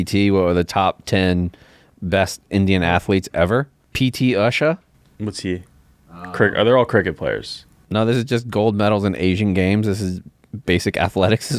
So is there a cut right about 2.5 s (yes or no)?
no